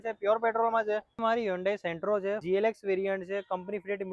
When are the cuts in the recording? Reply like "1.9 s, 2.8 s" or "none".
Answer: 1.2 s, 2.4 s